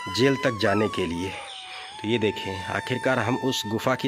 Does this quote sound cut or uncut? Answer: uncut